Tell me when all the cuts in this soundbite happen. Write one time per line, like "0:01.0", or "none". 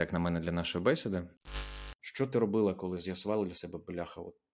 0:01.5